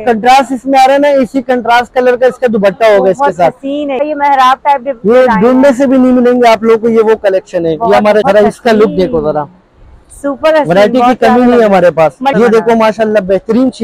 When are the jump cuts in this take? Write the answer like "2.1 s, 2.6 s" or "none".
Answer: 4.0 s, 8.2 s, 12.3 s